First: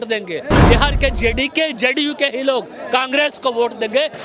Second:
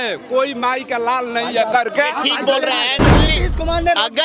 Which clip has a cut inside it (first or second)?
second